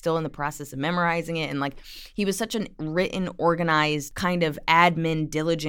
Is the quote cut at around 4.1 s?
yes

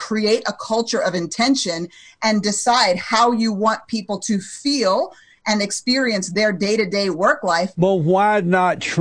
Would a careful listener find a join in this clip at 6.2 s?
no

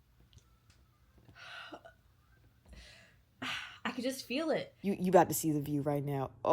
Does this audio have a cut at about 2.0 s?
no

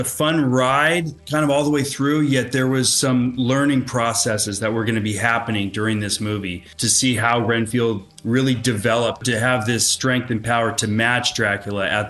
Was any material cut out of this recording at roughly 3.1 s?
no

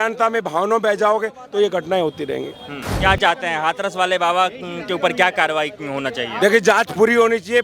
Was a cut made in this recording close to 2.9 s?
yes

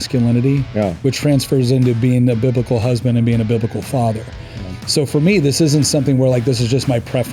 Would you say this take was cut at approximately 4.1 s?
no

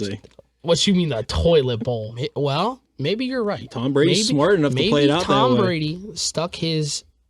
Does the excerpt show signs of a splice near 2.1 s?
yes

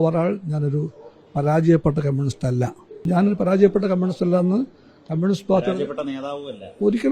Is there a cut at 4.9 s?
no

